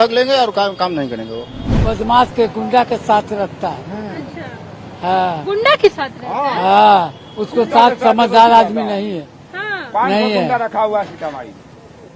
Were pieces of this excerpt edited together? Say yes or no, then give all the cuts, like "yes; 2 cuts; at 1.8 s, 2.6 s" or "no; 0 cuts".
yes; 1 cut; at 1.7 s